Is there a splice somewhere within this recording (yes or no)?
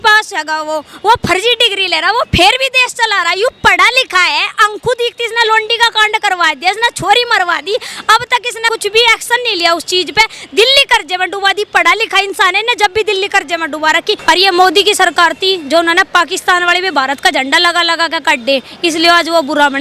yes